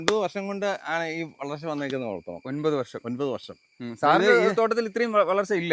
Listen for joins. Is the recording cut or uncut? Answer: uncut